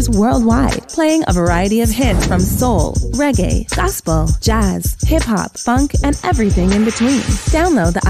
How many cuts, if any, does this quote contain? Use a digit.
0